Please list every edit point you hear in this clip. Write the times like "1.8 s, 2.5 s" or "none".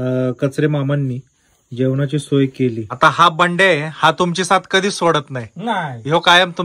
2.9 s